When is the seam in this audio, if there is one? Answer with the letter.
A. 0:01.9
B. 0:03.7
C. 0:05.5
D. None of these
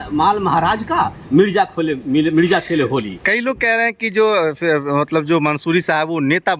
D